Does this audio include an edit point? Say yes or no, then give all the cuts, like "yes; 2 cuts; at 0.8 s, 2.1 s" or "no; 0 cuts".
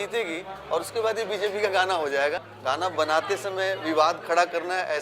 yes; 1 cut; at 2.4 s